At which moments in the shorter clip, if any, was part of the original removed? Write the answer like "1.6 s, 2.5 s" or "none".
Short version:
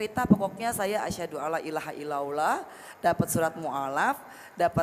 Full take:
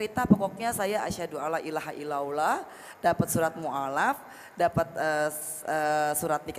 none